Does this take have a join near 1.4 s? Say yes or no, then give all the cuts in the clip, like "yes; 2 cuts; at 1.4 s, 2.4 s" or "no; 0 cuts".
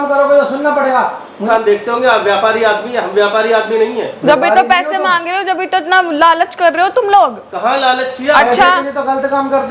yes; 1 cut; at 1.4 s